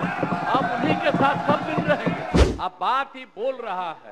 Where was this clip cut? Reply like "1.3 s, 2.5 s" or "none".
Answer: 2.4 s